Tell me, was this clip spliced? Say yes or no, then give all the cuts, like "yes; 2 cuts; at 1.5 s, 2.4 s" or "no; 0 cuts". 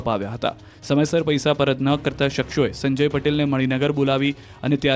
yes; 1 cut; at 1.7 s